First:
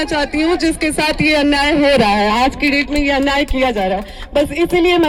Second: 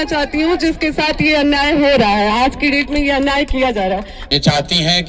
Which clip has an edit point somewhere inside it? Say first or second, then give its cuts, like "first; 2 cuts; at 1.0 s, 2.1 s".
second; 1 cut; at 4.1 s